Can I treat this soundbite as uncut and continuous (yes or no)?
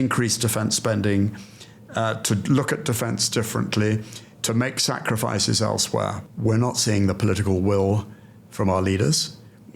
no